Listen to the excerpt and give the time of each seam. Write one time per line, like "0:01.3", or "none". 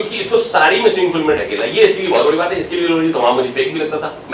none